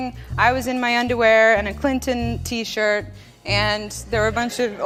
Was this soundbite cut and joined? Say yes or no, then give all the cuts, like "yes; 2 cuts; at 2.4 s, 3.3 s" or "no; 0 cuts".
no; 0 cuts